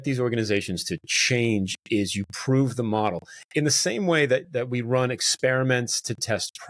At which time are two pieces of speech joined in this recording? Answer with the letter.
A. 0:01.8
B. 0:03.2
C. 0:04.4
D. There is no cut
C